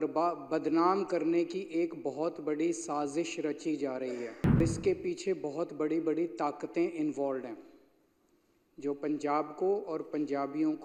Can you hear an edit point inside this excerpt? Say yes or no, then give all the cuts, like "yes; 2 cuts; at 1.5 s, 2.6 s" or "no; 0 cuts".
yes; 1 cut; at 4.6 s